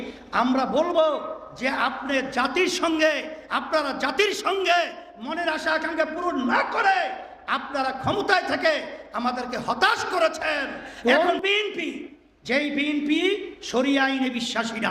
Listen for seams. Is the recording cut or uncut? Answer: cut